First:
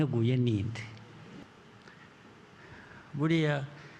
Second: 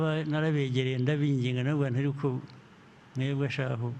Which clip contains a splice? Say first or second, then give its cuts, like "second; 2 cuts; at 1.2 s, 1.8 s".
first; 1 cut; at 1.4 s